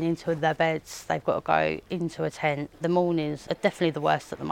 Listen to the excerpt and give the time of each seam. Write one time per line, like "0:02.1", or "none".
0:02.7
0:03.4

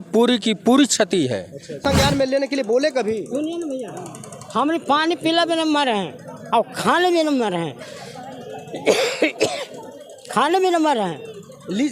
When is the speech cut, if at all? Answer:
0:01.8

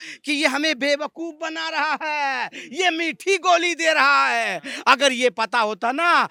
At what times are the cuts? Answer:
none

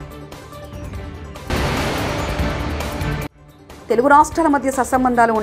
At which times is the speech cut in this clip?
0:01.5
0:03.3

